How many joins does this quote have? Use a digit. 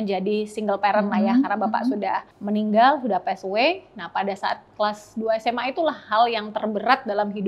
1